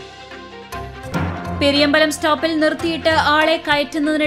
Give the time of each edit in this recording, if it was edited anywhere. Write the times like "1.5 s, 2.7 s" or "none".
1.1 s